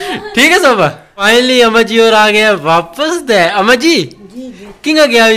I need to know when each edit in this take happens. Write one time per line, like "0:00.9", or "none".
0:01.3